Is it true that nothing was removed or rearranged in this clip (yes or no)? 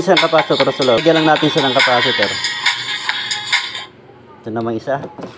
no